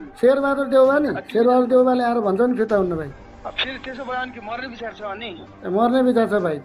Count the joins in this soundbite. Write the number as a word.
one